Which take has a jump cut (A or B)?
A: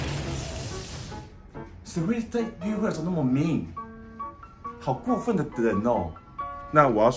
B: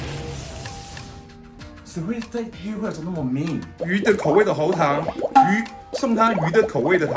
B